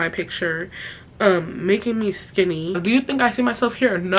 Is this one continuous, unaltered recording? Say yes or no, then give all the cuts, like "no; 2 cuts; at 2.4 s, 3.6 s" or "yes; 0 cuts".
no; 1 cut; at 2.8 s